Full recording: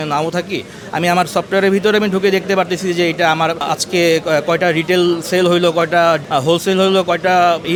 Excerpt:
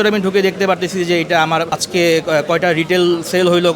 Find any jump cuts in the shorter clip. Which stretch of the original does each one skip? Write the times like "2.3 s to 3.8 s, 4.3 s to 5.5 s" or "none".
3.6 s to 3.7 s